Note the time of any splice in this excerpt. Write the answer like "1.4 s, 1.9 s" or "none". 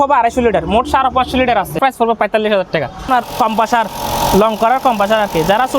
1.8 s, 3.1 s